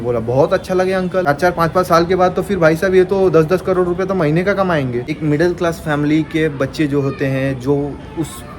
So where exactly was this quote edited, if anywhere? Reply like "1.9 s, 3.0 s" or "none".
1.3 s, 5.1 s